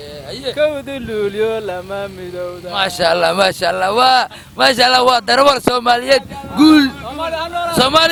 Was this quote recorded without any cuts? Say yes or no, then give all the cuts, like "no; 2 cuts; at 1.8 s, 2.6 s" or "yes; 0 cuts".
yes; 0 cuts